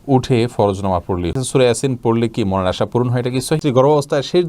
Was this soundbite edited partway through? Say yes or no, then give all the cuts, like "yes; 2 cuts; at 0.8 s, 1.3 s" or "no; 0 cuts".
yes; 2 cuts; at 1.4 s, 3.6 s